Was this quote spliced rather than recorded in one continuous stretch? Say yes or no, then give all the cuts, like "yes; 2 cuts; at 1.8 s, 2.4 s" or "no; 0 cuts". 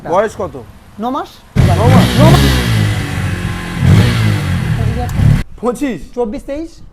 yes; 2 cuts; at 1.5 s, 5.4 s